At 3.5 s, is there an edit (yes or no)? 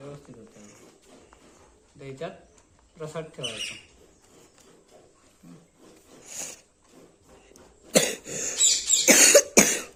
no